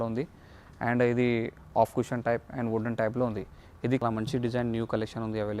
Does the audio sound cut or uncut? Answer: cut